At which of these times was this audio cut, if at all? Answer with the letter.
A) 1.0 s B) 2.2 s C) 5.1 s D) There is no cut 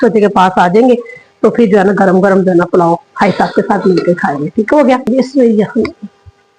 C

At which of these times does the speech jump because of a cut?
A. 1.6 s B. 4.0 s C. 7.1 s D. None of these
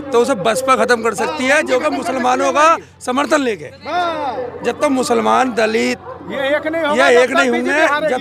D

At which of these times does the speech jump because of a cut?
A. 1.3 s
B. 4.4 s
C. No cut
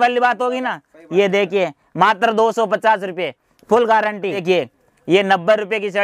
B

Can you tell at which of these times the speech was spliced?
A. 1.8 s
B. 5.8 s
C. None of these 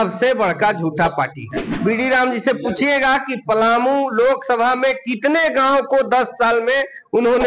A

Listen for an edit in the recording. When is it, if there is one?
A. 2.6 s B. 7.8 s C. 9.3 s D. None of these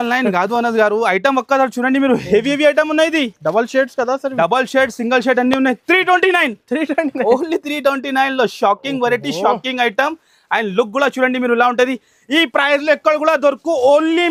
D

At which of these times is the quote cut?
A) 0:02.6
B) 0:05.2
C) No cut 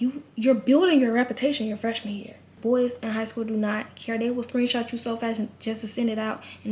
A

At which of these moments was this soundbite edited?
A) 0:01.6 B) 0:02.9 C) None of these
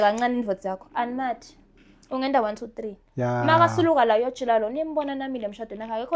C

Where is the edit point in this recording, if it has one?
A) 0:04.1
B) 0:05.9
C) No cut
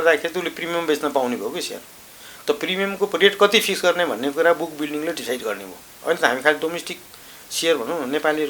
B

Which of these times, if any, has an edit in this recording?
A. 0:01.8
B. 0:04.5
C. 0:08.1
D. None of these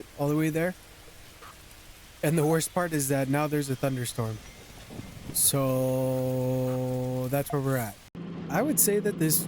C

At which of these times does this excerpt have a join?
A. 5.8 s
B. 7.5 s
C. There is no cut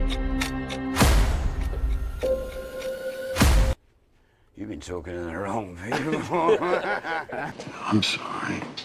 B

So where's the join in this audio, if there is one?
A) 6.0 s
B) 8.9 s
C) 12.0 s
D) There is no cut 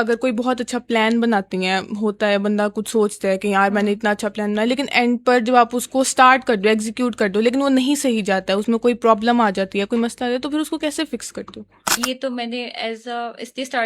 C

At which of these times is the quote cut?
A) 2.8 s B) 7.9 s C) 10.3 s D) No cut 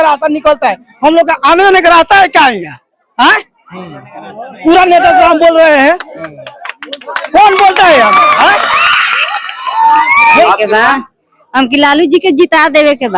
C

